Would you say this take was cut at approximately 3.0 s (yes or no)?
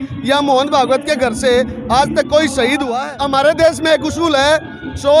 yes